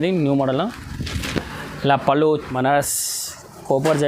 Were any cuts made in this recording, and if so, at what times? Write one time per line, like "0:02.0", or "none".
0:02.5